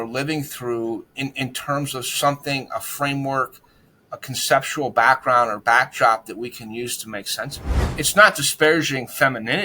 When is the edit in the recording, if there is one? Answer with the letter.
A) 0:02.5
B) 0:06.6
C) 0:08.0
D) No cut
C